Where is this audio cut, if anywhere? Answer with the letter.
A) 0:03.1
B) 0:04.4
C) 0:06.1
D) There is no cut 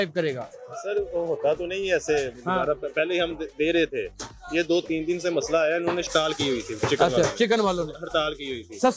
C